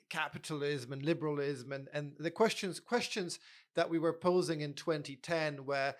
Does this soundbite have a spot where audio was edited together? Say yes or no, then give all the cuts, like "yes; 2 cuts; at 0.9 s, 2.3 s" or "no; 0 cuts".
no; 0 cuts